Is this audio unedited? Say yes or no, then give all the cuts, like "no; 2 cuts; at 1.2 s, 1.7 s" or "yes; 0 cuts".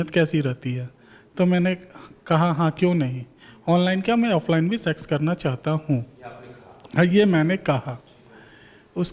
yes; 0 cuts